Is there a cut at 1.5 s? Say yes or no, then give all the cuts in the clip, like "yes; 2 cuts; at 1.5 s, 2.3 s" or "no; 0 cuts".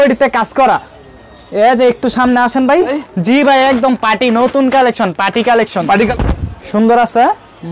no; 2 cuts; at 3.1 s, 6.1 s